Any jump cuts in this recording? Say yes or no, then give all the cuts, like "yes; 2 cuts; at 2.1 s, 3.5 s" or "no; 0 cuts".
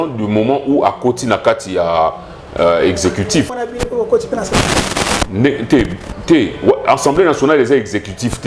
yes; 1 cut; at 3.5 s